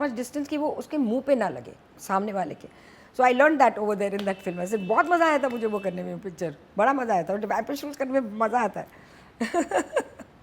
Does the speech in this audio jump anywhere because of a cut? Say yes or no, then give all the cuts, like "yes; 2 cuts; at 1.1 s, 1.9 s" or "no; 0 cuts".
no; 0 cuts